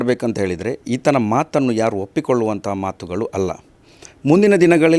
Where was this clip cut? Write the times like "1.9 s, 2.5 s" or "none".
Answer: none